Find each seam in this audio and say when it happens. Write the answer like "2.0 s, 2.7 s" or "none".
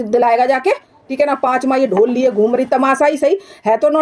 1.1 s